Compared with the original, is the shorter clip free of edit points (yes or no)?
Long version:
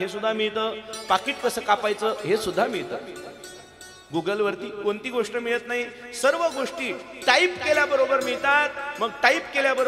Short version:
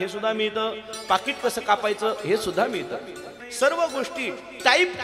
no